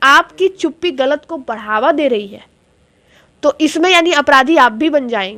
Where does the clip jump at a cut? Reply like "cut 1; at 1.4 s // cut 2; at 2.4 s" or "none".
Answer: none

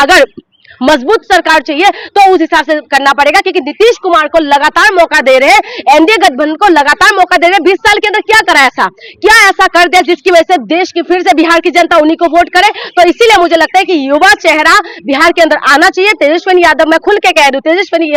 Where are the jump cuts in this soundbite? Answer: none

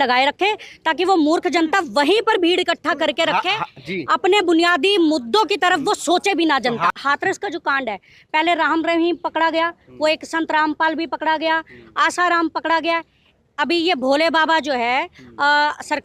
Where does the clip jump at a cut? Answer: cut 1; at 7.0 s

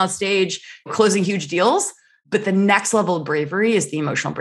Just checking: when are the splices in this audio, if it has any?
cut 1; at 0.9 s

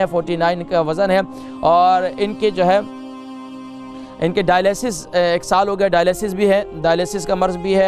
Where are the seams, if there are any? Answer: none

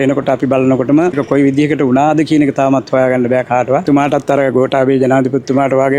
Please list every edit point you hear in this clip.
cut 1; at 1.1 s // cut 2; at 3.8 s

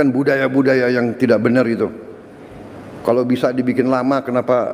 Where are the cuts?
none

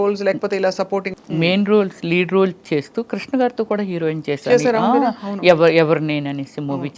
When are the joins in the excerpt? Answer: cut 1; at 1.1 s

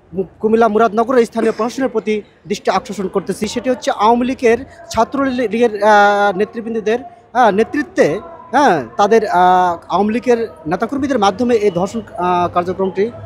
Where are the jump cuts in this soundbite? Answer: cut 1; at 3.4 s

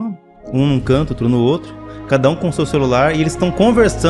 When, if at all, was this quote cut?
none

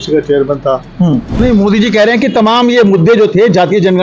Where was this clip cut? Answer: cut 1; at 1.4 s

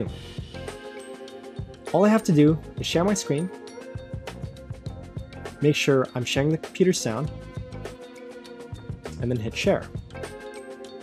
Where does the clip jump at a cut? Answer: cut 1; at 9.9 s

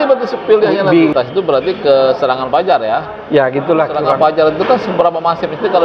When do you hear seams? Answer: cut 1; at 1.1 s // cut 2; at 4.1 s

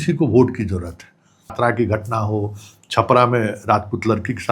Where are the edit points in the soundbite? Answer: cut 1; at 1.5 s

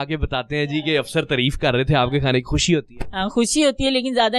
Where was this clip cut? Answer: none

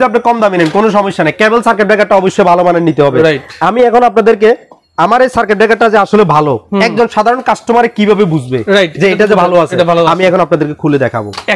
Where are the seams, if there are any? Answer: none

